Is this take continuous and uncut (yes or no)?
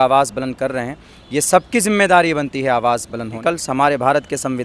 no